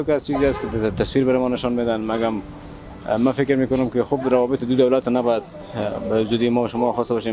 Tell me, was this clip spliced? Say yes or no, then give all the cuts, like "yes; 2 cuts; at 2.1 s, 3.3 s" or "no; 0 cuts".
no; 0 cuts